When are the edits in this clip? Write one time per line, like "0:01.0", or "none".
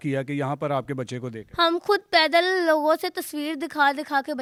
none